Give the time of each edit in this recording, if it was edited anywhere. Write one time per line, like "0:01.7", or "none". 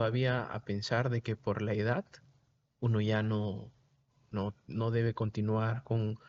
none